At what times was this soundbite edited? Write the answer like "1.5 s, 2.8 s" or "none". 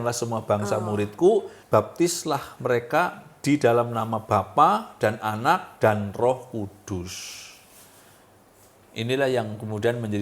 1.6 s